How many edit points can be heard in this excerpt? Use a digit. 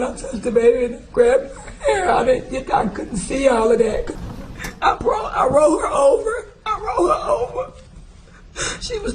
1